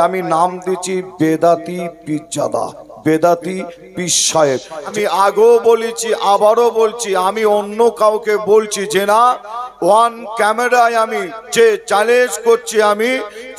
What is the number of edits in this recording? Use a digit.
1